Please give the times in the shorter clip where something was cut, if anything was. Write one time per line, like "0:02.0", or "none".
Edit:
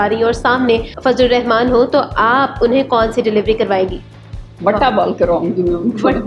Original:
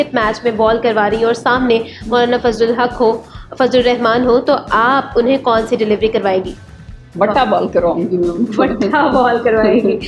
0:00.9